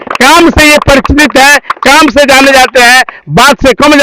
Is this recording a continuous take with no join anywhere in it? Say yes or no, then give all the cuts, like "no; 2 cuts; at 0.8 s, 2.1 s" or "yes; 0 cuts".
yes; 0 cuts